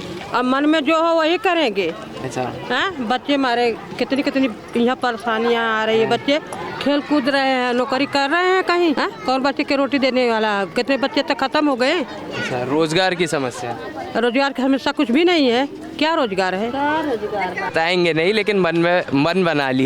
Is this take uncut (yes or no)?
yes